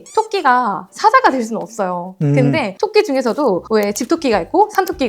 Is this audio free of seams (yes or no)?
yes